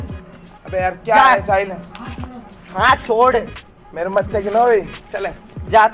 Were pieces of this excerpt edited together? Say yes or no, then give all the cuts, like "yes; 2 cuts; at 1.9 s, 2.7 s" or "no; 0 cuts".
no; 0 cuts